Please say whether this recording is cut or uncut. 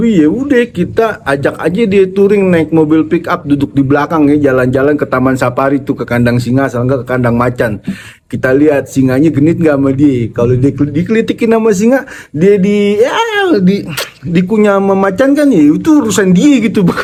uncut